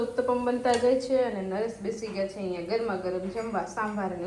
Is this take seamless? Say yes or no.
yes